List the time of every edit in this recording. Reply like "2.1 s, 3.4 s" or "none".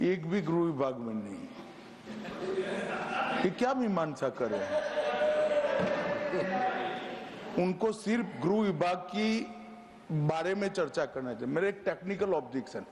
none